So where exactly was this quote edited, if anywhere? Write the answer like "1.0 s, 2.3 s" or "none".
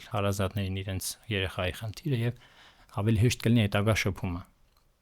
none